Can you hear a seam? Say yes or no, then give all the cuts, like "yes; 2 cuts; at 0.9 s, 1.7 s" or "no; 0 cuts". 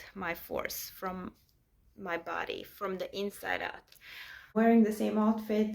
yes; 1 cut; at 4.5 s